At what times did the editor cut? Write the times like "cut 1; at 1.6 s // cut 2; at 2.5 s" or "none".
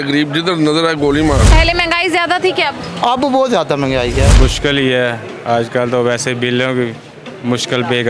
cut 1; at 1.5 s // cut 2; at 4.3 s